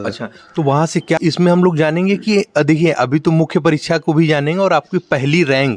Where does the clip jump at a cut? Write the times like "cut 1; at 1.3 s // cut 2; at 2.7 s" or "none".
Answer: cut 1; at 1.2 s

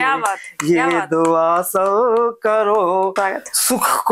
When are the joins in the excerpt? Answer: cut 1; at 3.1 s

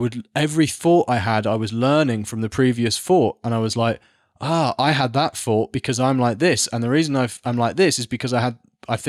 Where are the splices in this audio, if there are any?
none

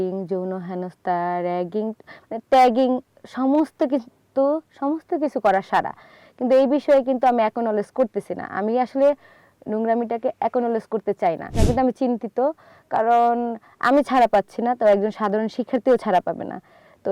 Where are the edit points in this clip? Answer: cut 1; at 11.5 s

